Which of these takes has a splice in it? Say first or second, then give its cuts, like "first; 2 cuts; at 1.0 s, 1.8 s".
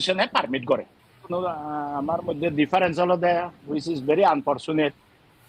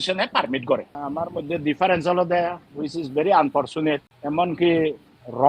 second; 2 cuts; at 1.0 s, 4.1 s